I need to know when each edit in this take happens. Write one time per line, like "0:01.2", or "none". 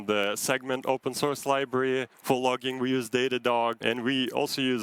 0:02.1
0:03.8